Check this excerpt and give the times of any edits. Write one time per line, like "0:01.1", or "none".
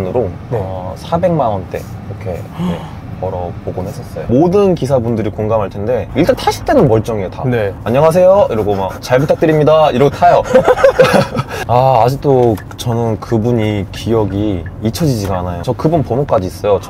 0:04.2
0:07.7
0:11.5
0:15.6